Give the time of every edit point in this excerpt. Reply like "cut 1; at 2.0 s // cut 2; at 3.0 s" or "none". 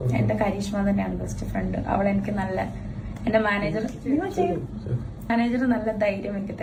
none